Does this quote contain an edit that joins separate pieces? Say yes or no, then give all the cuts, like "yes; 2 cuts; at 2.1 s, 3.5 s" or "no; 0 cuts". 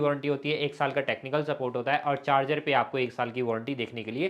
no; 0 cuts